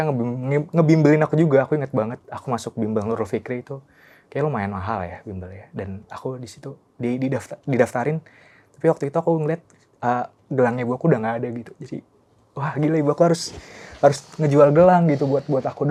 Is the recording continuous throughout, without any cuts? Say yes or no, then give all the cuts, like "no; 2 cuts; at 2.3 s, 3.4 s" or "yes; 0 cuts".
yes; 0 cuts